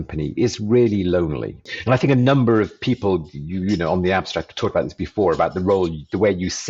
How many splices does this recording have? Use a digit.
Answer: 1